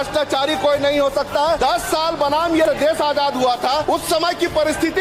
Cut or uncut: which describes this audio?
uncut